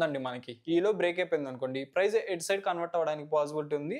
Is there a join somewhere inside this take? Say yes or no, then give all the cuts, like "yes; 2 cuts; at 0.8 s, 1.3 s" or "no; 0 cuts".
no; 0 cuts